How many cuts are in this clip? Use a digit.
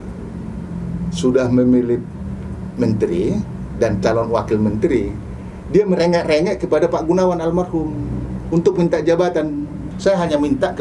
1